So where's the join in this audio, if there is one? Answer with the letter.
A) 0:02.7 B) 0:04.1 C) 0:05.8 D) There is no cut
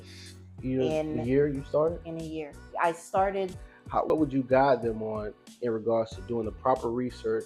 B